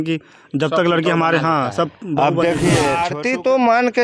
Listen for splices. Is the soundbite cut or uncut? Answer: cut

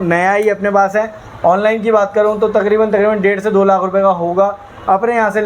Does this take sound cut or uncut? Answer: uncut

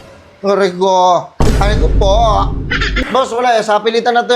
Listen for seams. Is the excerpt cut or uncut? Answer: cut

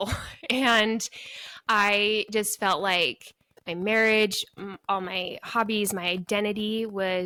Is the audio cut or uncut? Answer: uncut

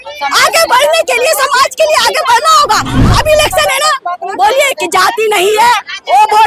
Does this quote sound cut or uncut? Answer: cut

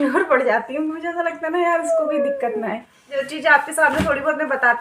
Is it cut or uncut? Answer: cut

